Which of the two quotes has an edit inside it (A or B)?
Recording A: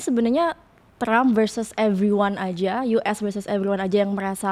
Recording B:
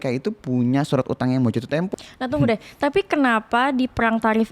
B